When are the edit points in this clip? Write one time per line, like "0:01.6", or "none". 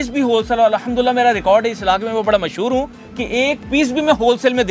none